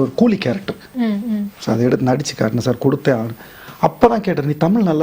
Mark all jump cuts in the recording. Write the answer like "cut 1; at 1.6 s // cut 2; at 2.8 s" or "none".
none